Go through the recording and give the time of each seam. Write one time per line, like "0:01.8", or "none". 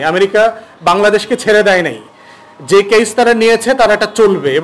none